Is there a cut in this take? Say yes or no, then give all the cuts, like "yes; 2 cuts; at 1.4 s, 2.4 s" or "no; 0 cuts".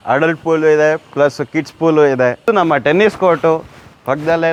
no; 0 cuts